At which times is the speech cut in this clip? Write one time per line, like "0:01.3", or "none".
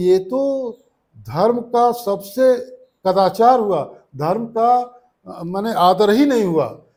none